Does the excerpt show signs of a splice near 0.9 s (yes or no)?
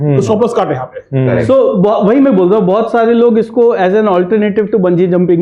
no